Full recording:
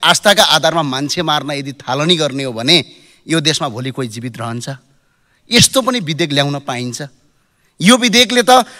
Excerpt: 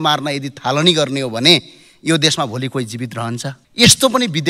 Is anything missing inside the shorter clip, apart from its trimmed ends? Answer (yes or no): yes